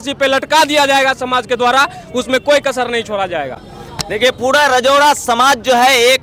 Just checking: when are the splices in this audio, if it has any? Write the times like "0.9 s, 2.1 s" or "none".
none